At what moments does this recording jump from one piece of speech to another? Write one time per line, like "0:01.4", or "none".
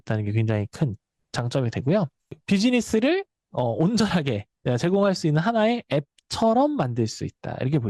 0:02.4